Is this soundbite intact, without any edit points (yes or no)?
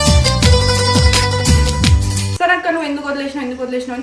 no